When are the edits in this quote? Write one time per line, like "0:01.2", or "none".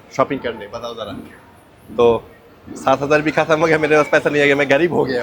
none